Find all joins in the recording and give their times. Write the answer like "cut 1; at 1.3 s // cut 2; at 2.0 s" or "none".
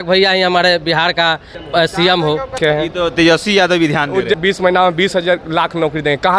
cut 1; at 1.5 s // cut 2; at 2.6 s // cut 3; at 4.4 s